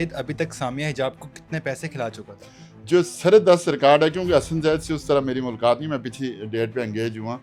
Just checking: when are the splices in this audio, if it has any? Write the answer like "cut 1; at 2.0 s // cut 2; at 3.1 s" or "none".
none